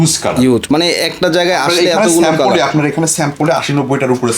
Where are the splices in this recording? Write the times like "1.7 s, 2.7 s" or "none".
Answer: none